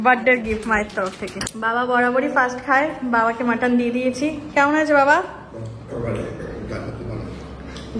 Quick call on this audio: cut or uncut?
cut